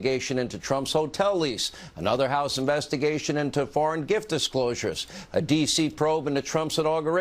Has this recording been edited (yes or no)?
yes